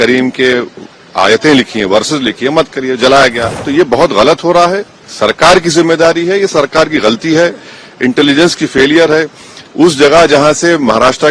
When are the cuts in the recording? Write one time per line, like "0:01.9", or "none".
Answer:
0:03.4